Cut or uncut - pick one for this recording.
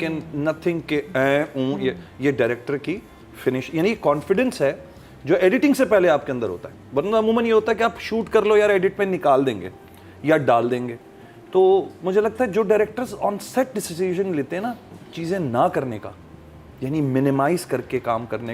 uncut